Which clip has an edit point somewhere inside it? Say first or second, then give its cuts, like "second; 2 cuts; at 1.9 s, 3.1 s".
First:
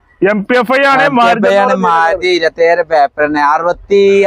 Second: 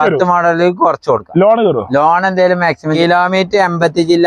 second; 1 cut; at 2.9 s